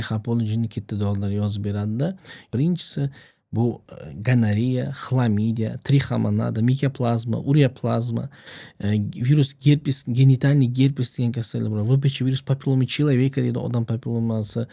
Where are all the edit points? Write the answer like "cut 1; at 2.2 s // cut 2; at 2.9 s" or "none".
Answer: cut 1; at 2.5 s